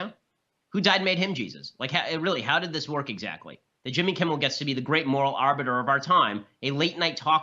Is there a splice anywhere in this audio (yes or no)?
no